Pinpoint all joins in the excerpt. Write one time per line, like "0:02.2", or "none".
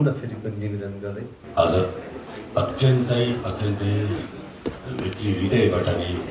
0:01.4